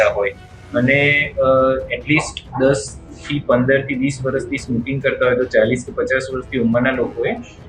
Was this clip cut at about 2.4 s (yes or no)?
no